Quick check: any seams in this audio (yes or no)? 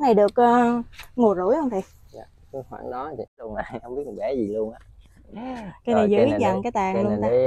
yes